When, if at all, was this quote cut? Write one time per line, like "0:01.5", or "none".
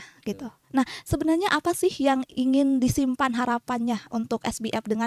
none